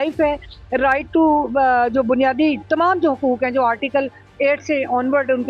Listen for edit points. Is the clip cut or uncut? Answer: uncut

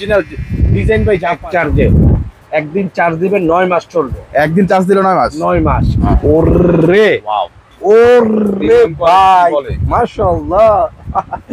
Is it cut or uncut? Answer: cut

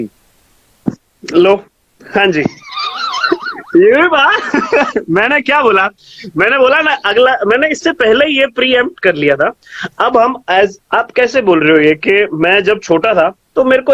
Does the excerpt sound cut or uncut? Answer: uncut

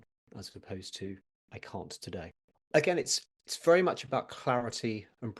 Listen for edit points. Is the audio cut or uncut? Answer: cut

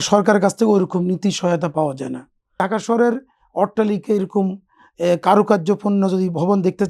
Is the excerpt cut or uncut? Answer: cut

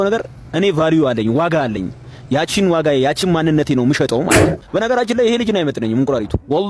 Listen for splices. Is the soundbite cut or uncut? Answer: uncut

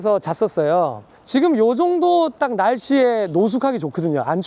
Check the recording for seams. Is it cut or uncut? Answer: cut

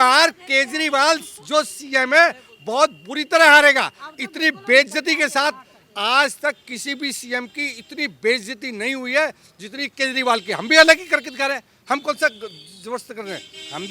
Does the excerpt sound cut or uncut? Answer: uncut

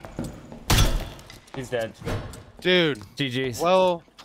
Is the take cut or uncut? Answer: uncut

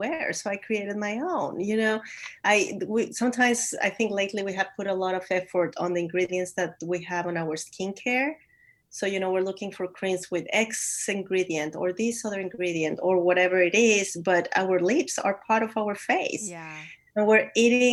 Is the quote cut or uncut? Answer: uncut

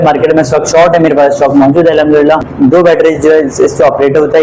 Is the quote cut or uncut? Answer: cut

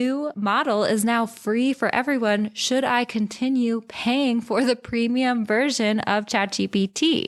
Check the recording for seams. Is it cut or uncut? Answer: uncut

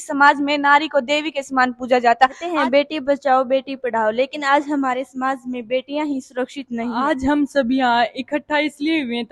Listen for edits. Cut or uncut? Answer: cut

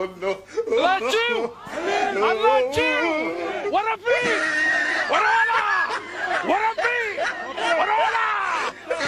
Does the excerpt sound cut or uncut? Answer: uncut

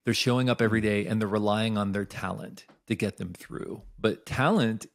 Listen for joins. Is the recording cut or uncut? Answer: uncut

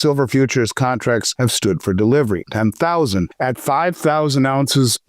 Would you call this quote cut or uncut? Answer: cut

